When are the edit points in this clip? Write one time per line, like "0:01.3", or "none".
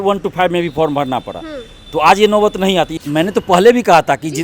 0:03.0